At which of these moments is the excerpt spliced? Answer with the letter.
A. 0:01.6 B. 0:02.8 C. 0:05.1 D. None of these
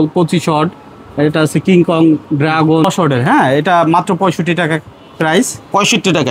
B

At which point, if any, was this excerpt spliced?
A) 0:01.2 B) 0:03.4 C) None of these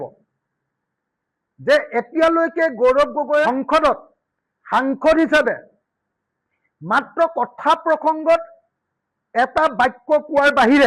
B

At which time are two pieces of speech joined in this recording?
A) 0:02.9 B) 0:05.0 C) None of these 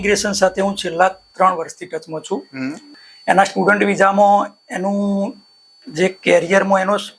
A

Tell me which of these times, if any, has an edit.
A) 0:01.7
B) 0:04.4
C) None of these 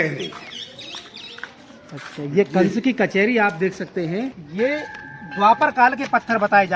B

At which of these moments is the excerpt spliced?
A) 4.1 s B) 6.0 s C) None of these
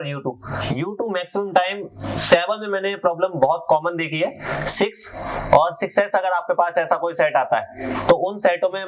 C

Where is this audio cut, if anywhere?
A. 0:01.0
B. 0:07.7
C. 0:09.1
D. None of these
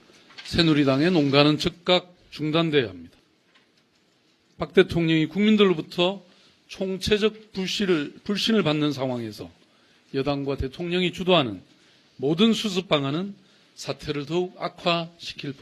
C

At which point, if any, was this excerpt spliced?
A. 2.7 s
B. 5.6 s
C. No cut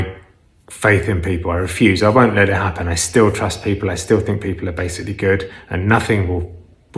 C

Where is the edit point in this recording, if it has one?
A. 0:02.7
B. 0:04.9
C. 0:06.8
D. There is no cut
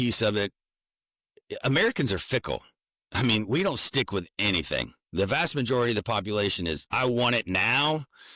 C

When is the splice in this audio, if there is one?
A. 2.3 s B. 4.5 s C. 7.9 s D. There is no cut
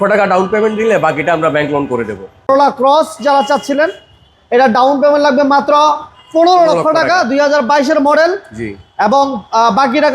A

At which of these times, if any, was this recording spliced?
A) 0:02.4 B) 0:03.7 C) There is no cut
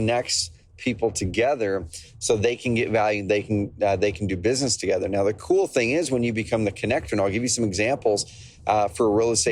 C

